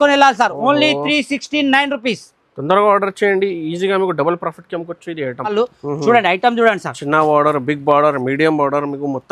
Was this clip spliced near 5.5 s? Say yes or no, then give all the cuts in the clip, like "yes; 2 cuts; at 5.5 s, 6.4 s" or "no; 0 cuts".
yes; 1 cut; at 5.5 s